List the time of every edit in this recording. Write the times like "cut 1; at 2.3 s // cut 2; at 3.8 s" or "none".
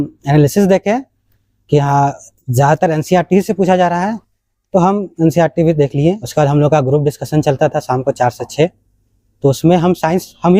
cut 1; at 6.2 s